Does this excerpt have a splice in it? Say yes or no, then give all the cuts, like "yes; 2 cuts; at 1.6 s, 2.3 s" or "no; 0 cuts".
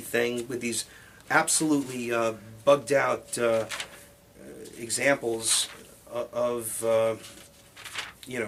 no; 0 cuts